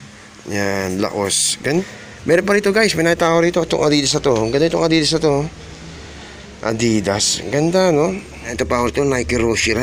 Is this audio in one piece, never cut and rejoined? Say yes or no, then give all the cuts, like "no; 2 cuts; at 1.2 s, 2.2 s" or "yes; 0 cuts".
no; 2 cuts; at 1.8 s, 8.5 s